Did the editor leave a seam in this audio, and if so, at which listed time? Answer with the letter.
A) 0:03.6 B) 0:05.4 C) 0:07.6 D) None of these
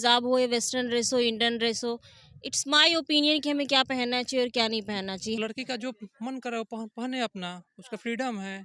B